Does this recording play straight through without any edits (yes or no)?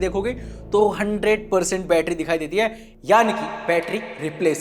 yes